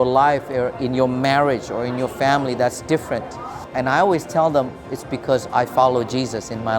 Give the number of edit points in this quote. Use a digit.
1